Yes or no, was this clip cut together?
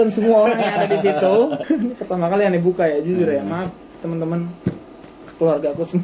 yes